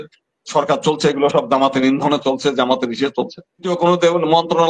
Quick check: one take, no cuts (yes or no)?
no